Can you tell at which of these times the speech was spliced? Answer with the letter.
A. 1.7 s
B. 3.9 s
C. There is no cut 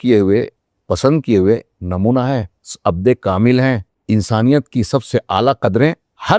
B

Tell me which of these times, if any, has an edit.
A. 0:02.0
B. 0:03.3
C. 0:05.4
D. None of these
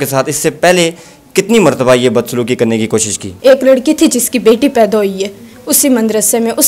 B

